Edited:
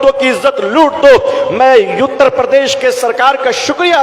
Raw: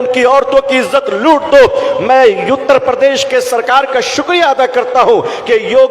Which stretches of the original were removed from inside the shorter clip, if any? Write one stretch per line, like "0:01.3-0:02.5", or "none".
none

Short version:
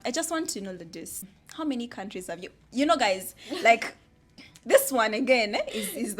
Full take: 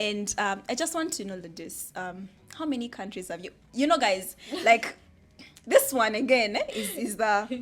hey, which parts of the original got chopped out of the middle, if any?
0:01.9-0:02.2

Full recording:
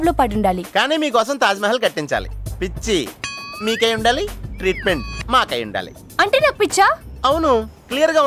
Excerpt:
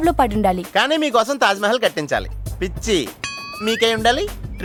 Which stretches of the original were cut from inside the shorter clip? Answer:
none

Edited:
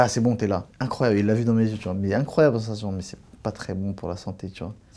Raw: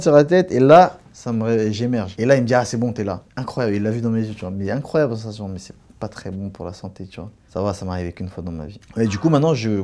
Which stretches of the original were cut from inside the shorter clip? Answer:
none

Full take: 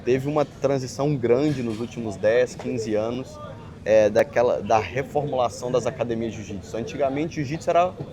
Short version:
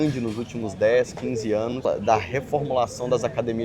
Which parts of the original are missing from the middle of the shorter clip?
0:03.3-0:04.5

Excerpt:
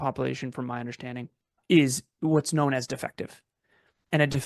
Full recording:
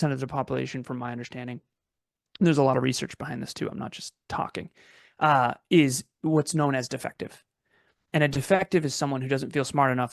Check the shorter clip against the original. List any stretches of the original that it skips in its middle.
0:01.9-0:05.6

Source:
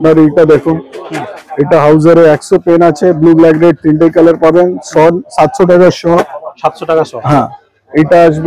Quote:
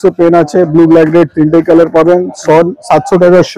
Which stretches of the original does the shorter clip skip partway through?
none

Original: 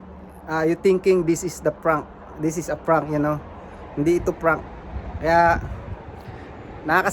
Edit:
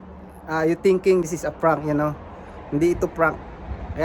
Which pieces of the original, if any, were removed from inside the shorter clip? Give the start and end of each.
0:01.2-0:02.5

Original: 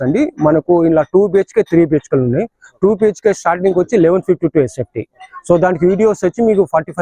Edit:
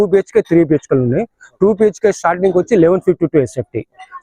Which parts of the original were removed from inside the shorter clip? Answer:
none

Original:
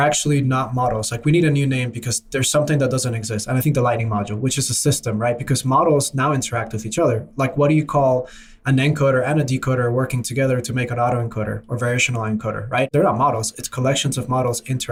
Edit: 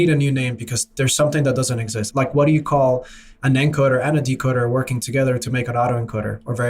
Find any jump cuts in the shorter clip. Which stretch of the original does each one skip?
0:03.4-0:07.3

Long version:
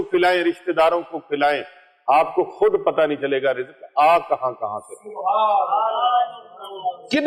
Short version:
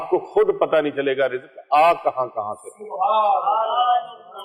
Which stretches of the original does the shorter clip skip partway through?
none

